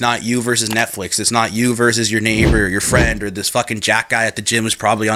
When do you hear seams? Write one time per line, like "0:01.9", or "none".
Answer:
none